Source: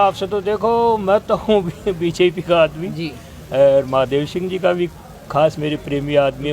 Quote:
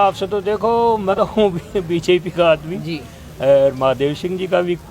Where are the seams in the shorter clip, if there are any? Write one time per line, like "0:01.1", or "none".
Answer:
0:01.1